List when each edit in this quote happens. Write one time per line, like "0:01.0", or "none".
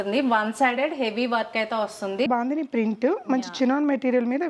0:02.3